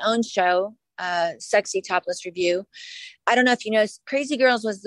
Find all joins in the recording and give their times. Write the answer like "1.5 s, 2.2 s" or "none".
none